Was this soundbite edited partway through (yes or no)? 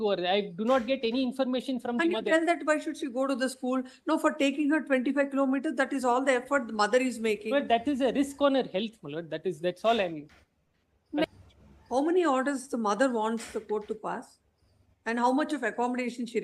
yes